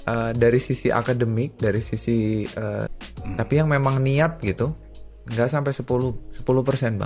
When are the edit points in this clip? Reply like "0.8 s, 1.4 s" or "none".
2.9 s